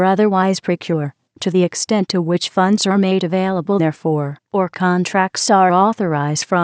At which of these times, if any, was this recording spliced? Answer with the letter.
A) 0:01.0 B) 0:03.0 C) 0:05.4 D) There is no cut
A